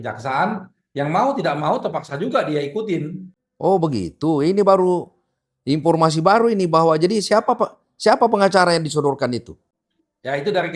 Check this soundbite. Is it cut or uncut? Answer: uncut